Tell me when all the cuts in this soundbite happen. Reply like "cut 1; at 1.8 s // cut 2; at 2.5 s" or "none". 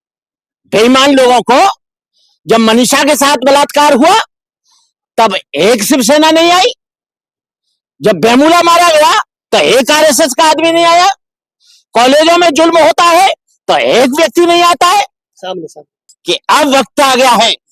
cut 1; at 16.1 s